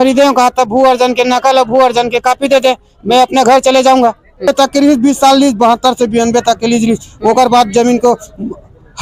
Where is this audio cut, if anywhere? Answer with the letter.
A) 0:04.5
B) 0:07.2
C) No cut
A